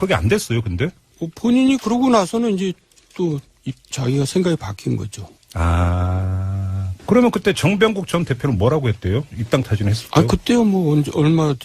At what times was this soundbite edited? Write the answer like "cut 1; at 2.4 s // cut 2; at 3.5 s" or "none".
cut 1; at 7.6 s